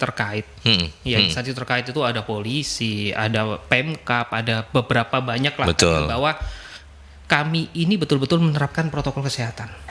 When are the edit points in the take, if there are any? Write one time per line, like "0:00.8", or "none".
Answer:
none